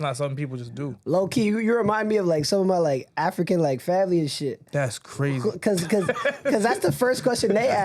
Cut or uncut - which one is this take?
cut